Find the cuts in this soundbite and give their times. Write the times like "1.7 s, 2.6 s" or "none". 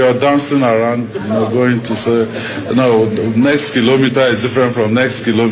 none